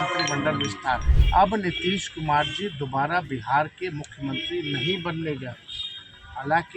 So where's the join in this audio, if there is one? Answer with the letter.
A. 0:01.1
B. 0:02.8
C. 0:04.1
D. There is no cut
A